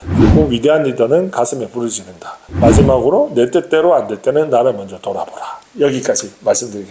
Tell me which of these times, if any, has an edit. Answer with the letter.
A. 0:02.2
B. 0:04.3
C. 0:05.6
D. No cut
D